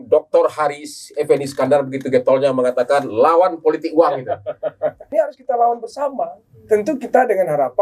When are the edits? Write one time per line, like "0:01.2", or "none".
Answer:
0:05.1